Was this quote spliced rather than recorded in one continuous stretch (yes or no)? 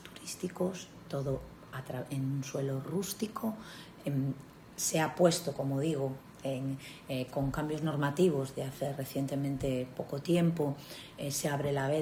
no